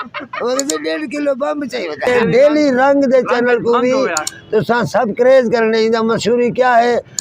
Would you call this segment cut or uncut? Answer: cut